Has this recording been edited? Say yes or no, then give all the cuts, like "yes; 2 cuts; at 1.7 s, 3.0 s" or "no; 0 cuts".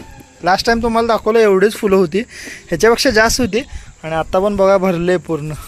no; 0 cuts